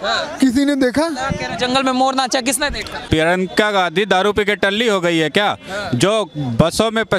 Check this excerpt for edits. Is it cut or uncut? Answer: cut